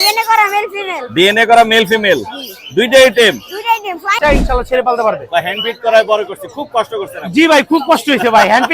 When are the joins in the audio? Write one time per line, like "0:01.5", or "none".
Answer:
0:04.1